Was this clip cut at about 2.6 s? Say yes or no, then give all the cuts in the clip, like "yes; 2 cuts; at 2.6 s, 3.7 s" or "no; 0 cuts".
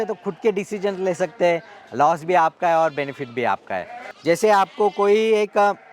no; 1 cut; at 4.1 s